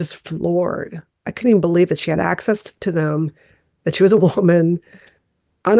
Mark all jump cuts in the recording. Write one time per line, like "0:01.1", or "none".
none